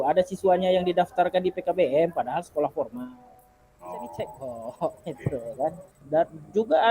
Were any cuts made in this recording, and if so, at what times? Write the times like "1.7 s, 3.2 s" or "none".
6.0 s